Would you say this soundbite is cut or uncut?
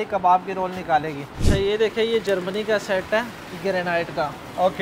cut